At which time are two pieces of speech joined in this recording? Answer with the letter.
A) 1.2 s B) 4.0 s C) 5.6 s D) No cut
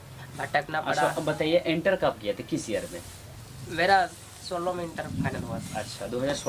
D